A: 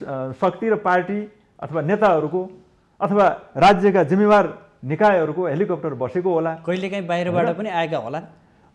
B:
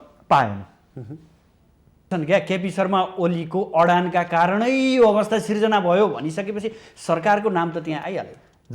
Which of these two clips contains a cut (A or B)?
B